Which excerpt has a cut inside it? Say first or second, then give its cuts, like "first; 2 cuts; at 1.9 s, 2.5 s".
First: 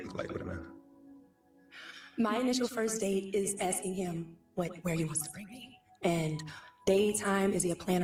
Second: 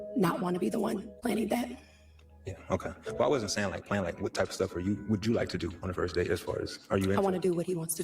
second; 1 cut; at 1.1 s